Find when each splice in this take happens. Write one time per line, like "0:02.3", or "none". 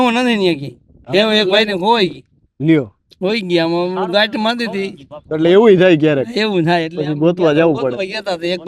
none